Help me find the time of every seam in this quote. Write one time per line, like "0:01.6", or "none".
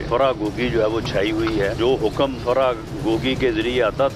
0:01.8